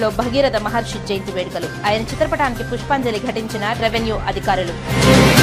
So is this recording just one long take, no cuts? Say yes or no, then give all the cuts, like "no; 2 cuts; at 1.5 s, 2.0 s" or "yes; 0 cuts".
yes; 0 cuts